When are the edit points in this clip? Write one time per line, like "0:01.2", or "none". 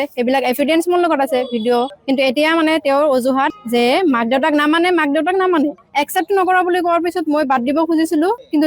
0:01.9
0:05.8